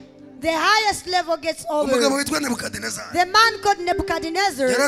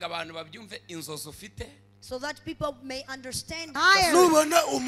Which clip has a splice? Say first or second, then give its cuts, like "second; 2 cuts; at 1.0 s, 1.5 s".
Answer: second; 1 cut; at 3.7 s